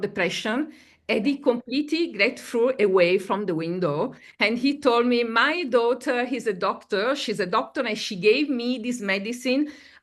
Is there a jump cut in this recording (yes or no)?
no